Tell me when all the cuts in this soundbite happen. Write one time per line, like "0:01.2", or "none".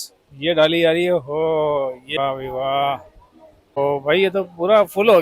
0:02.2
0:03.8